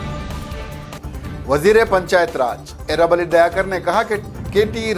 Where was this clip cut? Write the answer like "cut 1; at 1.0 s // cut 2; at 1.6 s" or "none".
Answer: cut 1; at 1.0 s